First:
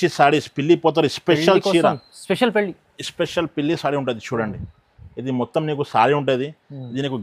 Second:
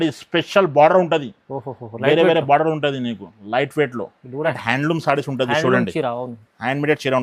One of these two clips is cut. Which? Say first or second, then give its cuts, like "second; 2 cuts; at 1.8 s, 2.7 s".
second; 1 cut; at 4.6 s